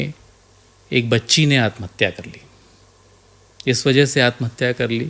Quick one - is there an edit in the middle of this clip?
no; 0 cuts

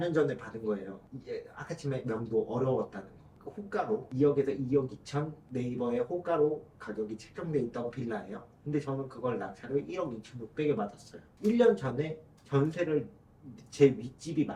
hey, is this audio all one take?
yes; 0 cuts

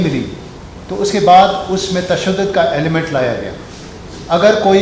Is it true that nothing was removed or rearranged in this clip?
yes; 0 cuts

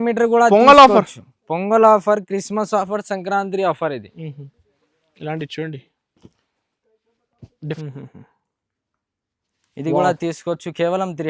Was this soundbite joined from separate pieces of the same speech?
yes; 1 cut; at 7.8 s

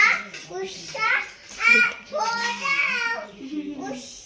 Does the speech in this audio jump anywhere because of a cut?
no; 0 cuts

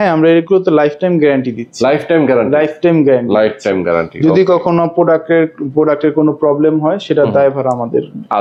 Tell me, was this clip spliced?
no; 0 cuts

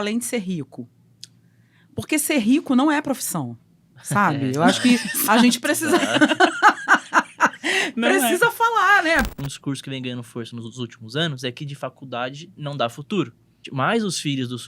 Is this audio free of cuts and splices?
no; 2 cuts; at 9.3 s, 13.7 s

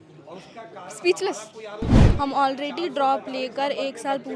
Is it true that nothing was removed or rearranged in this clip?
no; 1 cut; at 2.0 s

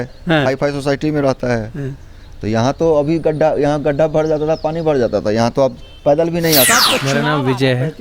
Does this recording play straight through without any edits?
no; 1 cut; at 7.0 s

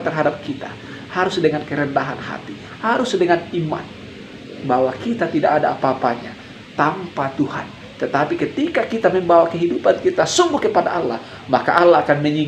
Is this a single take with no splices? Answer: yes; 0 cuts

